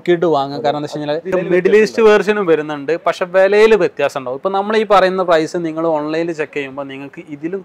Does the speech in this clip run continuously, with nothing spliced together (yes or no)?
no